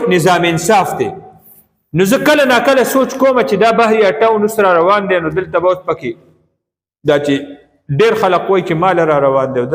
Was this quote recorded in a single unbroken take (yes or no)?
yes